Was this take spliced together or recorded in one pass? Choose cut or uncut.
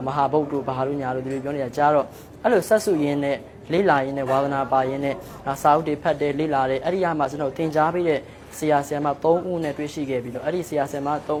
uncut